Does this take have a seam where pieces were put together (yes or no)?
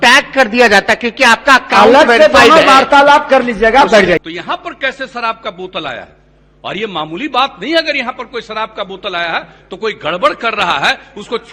yes